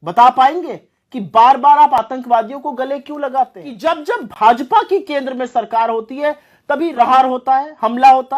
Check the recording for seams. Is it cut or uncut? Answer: cut